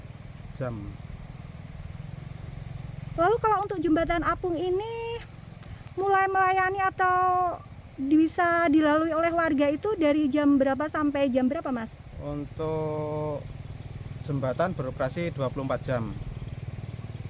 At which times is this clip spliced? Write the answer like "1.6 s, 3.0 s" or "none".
none